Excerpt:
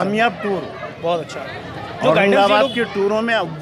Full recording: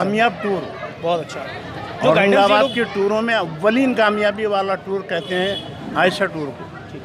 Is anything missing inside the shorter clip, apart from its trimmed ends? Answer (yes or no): no